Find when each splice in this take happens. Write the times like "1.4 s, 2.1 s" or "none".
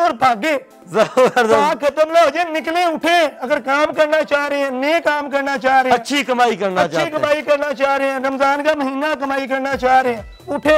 none